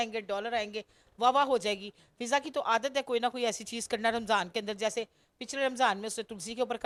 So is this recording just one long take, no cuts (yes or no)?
yes